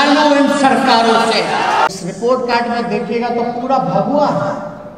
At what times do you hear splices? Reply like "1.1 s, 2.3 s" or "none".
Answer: 1.9 s